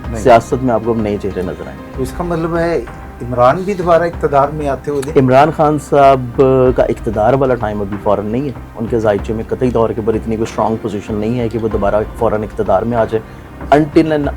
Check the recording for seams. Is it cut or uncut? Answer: uncut